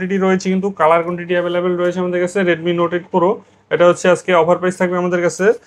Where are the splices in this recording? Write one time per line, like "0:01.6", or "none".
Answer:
none